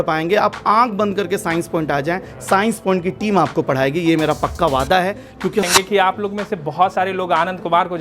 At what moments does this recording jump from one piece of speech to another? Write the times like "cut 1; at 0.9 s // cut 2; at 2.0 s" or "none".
cut 1; at 5.6 s